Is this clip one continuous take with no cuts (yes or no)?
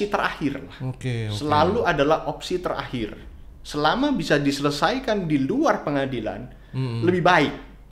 yes